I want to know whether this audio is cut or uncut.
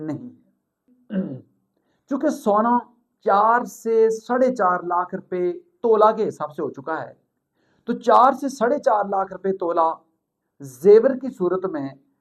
cut